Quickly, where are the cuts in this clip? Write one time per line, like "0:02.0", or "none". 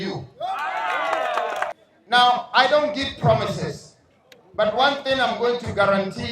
0:01.7